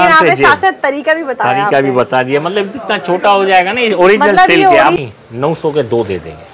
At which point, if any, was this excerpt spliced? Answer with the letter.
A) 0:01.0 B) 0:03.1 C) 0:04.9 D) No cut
C